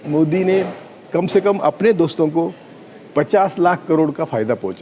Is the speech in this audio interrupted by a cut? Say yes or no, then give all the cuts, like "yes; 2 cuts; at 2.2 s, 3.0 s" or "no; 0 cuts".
no; 0 cuts